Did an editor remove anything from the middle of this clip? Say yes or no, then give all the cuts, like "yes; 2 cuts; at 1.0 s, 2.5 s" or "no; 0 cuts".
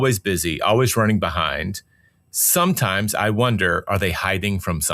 no; 0 cuts